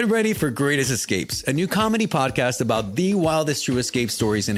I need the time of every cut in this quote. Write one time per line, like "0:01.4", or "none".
none